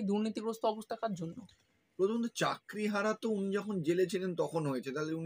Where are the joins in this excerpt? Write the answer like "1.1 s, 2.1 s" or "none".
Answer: none